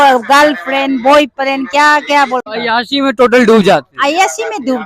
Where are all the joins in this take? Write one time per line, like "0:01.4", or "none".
0:02.5